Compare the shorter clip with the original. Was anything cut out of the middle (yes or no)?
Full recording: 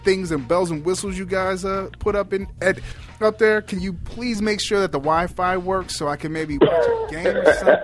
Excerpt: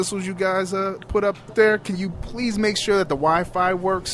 yes